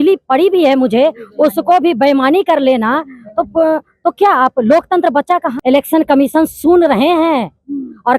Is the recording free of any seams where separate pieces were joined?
no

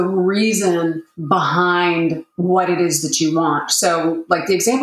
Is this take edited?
yes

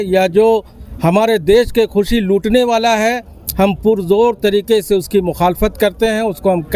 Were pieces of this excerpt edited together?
no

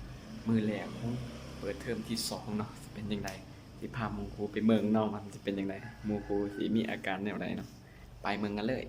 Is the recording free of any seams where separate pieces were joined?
no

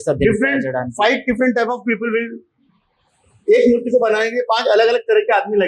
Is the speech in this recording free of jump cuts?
yes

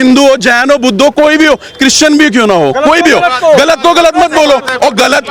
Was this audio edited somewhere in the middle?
no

